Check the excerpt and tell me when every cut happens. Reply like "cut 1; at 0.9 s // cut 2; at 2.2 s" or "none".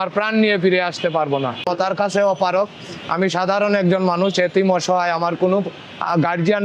cut 1; at 1.7 s